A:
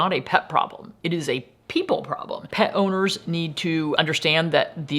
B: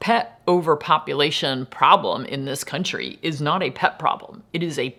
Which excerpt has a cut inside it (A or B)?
A